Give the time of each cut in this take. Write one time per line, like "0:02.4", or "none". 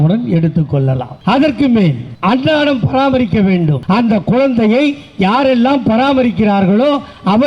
0:01.1
0:02.1
0:03.8